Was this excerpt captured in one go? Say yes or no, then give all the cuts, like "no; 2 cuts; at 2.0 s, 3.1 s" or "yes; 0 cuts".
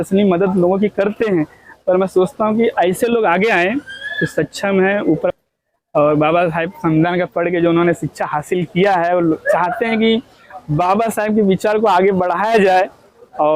no; 1 cut; at 5.3 s